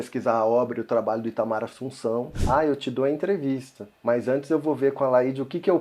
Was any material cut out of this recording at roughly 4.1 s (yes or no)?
no